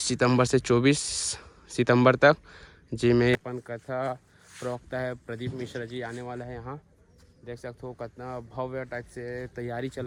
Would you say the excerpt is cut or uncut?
uncut